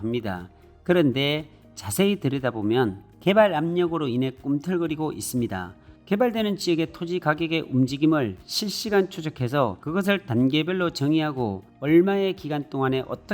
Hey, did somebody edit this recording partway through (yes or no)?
yes